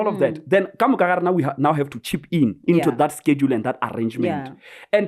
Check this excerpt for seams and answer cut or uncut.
uncut